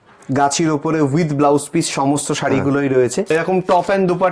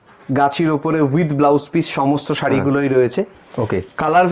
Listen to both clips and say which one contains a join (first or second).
first